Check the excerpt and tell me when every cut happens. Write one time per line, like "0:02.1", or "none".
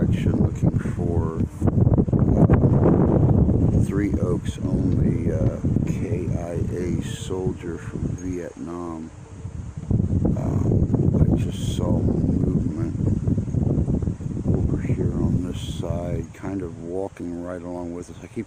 none